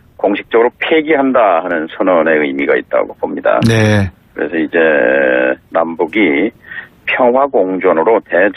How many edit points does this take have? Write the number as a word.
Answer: one